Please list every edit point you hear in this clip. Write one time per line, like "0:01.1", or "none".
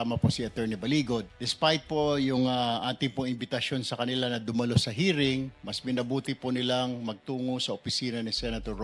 0:01.4